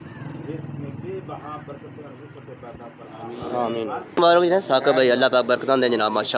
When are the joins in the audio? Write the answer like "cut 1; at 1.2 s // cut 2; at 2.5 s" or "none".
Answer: cut 1; at 4.2 s

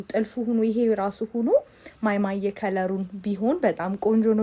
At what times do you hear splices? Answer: none

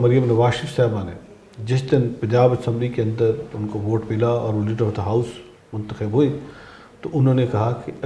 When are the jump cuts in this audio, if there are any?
none

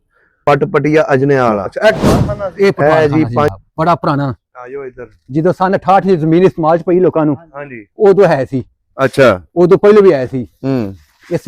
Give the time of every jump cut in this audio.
cut 1; at 3.5 s

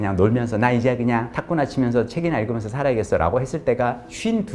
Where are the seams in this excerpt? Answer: cut 1; at 1.4 s

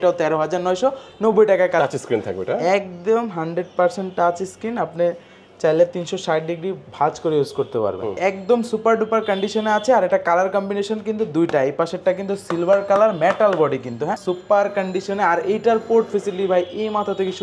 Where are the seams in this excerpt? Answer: cut 1; at 1.8 s // cut 2; at 8.1 s // cut 3; at 14.2 s

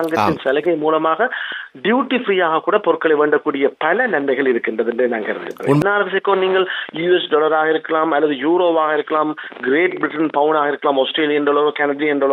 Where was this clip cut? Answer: cut 1; at 5.8 s

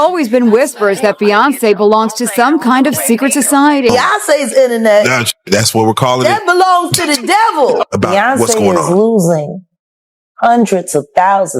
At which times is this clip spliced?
cut 1; at 4.0 s // cut 2; at 7.8 s

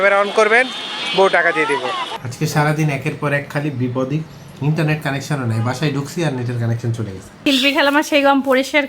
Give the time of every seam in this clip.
cut 1; at 2.1 s // cut 2; at 7.4 s

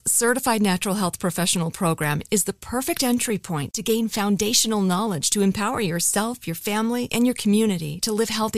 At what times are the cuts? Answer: none

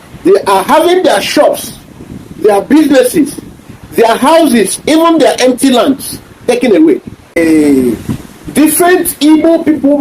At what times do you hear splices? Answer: cut 1; at 7.4 s

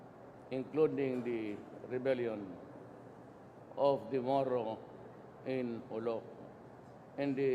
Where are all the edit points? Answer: cut 1; at 3.0 s

